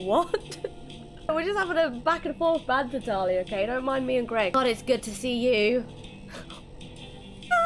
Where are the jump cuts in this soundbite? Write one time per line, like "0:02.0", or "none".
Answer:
0:01.3
0:04.5